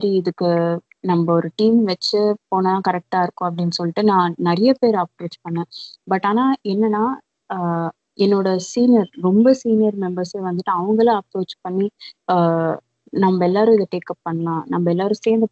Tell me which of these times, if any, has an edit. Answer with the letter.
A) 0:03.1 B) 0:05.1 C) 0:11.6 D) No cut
D